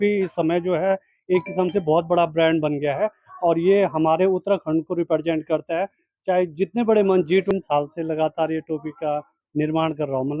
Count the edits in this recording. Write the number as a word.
one